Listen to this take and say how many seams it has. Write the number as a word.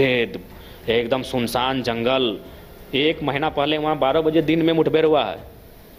zero